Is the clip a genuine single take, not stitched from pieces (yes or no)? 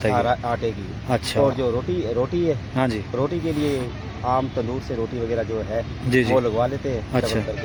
yes